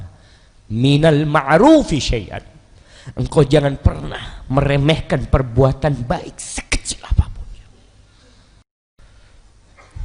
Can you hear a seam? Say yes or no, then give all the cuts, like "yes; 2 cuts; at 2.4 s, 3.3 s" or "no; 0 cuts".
yes; 1 cut; at 9.0 s